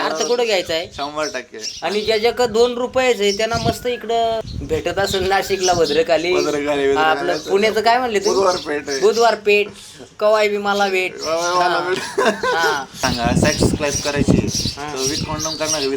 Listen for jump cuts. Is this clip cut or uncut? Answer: cut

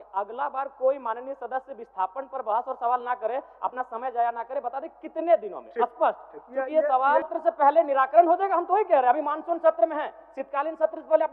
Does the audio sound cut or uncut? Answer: cut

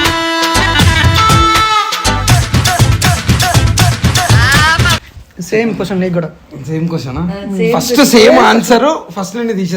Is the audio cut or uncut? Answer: cut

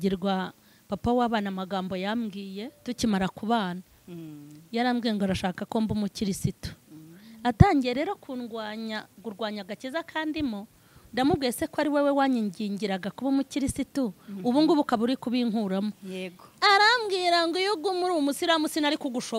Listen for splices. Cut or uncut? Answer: uncut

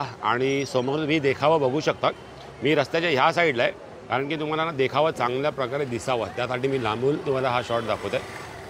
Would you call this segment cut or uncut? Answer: uncut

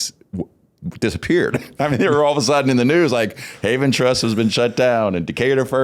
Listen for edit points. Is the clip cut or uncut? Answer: uncut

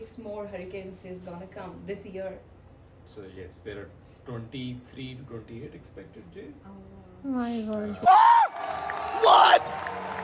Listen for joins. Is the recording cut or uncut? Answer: uncut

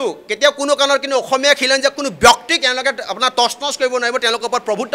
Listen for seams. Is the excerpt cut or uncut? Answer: uncut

